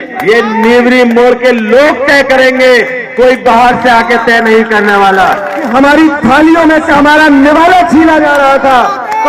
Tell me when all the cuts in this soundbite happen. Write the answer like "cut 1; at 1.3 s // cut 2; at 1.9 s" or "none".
cut 1; at 5.7 s